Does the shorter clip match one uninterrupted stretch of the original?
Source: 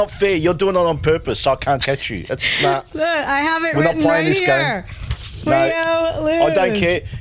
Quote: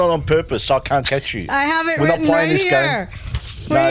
no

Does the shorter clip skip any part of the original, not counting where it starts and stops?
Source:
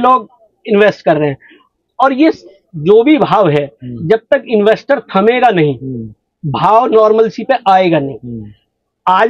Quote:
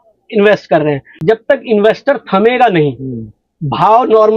yes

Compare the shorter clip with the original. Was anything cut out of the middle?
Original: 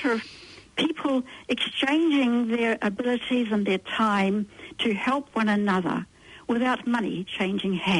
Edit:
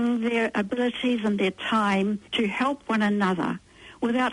yes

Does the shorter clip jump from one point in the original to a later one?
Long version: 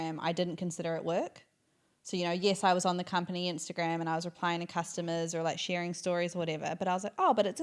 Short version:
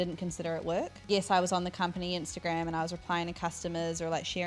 yes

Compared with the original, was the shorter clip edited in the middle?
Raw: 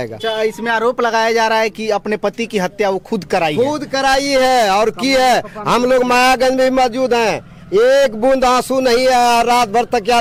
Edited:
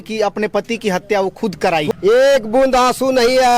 yes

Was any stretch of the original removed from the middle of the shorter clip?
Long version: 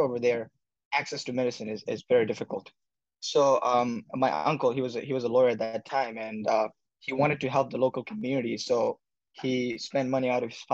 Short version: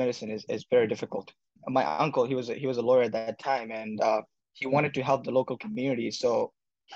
yes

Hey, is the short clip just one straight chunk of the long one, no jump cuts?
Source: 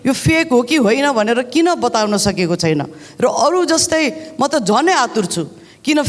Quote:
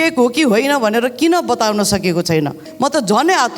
no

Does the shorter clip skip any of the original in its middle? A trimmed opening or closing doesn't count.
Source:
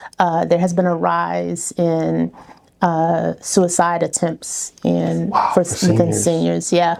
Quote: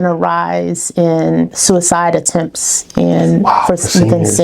yes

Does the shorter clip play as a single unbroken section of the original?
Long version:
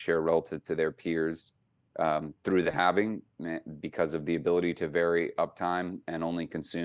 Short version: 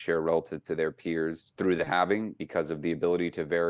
no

